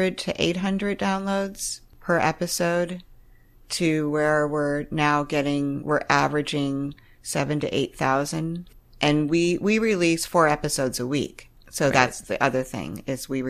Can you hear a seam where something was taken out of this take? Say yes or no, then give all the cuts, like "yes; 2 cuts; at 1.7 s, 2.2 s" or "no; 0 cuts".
no; 0 cuts